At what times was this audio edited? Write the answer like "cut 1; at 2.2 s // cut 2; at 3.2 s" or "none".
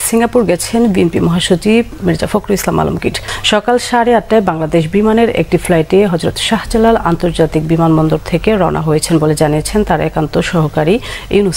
cut 1; at 3.3 s